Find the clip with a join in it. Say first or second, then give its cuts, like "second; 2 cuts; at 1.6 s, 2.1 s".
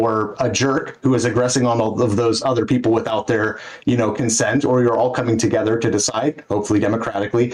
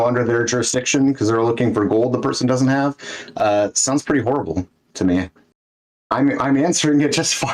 second; 1 cut; at 5.4 s